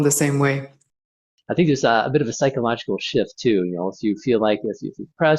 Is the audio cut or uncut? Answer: cut